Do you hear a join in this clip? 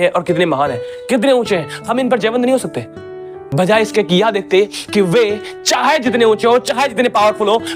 no; 0 cuts

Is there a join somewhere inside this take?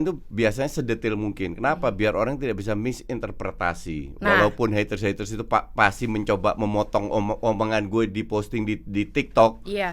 no; 0 cuts

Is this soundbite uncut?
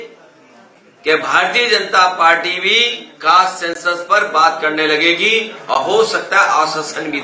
yes; 0 cuts

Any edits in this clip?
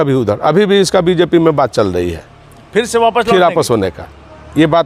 no; 0 cuts

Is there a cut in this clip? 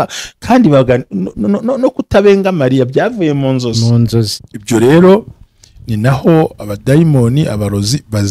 yes; 1 cut; at 4.4 s

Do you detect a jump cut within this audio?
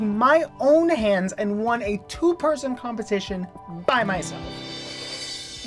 no; 0 cuts

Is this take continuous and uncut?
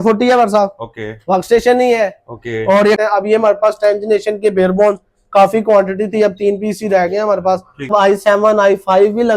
no; 2 cuts; at 3.0 s, 7.9 s

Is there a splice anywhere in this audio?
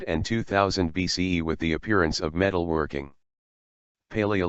no; 0 cuts

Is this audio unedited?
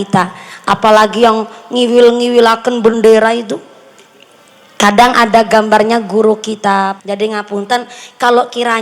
no; 1 cut; at 7.0 s

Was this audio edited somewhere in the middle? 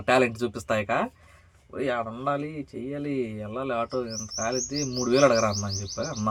no; 0 cuts

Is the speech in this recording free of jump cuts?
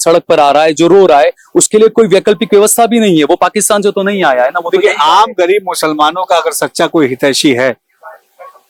yes; 0 cuts

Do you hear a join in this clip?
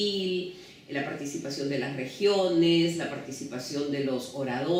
no; 0 cuts

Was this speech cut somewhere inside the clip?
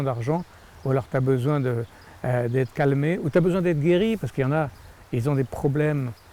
no; 0 cuts

